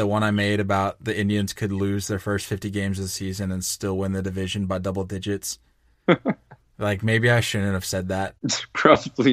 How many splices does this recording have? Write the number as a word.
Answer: one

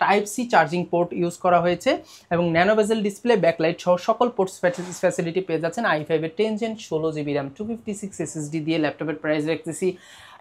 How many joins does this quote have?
zero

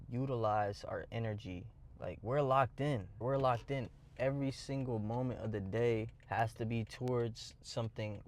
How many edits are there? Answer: one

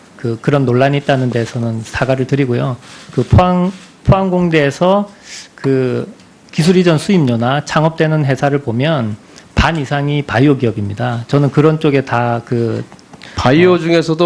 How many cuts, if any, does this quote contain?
zero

